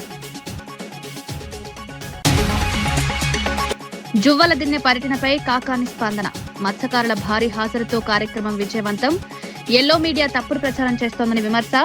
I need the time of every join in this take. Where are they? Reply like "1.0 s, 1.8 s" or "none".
none